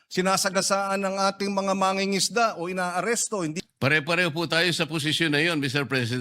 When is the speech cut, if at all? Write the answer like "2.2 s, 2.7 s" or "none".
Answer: 3.5 s